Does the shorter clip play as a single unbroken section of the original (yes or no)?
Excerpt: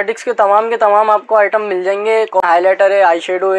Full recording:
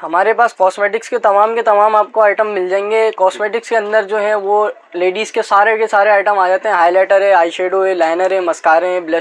no